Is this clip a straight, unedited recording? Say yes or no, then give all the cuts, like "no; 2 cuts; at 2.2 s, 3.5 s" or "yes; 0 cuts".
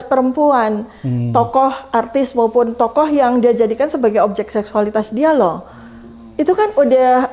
yes; 0 cuts